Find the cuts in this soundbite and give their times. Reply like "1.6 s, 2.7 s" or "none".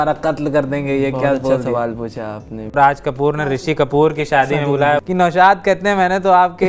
2.7 s, 5.0 s